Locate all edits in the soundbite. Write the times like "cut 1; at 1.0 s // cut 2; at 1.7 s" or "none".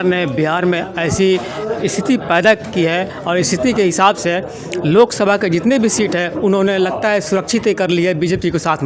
none